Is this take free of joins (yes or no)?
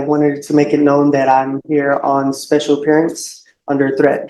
yes